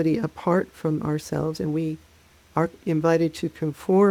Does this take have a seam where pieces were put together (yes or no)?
no